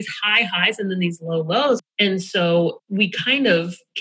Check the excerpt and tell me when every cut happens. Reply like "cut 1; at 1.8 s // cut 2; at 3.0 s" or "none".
cut 1; at 1.9 s // cut 2; at 2.8 s